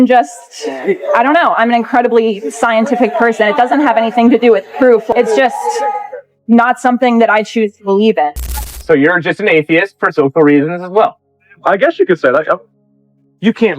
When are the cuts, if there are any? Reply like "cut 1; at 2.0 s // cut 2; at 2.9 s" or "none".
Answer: cut 1; at 5.1 s // cut 2; at 8.5 s